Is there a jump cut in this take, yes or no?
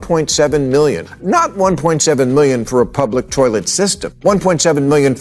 yes